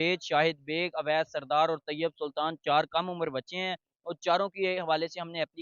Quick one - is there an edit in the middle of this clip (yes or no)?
no